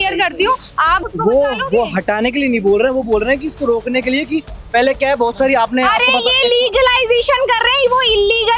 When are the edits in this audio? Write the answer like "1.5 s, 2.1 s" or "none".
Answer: 1.0 s